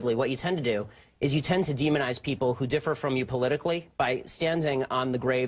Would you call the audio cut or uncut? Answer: cut